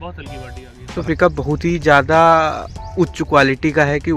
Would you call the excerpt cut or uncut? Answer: cut